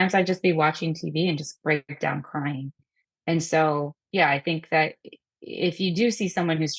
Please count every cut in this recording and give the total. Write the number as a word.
one